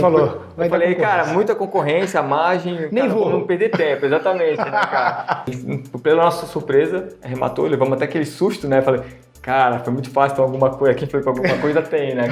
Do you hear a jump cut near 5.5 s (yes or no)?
yes